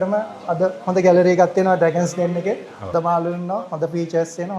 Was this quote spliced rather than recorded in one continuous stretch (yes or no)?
yes